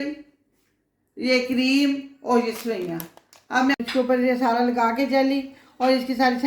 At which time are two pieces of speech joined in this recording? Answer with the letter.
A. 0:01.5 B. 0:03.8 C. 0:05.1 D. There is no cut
B